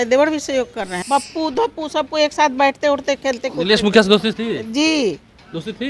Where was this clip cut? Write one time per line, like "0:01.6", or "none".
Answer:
0:01.0